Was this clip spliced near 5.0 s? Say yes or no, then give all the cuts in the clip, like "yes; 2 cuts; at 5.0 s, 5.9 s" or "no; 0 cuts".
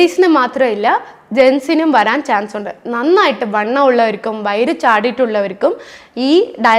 no; 0 cuts